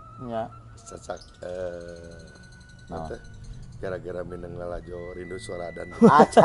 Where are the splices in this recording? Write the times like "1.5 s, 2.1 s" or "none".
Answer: none